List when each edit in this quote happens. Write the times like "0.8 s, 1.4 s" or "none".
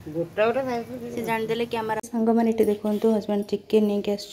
2.0 s